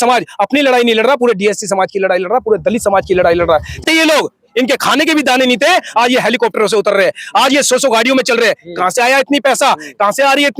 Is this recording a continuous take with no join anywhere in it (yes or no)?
no